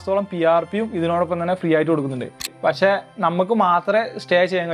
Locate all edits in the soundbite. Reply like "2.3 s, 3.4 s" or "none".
2.5 s